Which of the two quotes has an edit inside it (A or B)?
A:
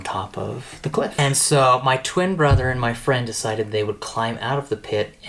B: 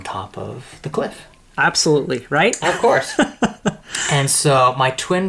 A